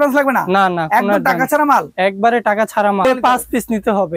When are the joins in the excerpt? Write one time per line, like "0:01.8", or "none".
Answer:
0:03.0